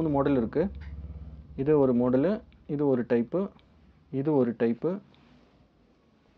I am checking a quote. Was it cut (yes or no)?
no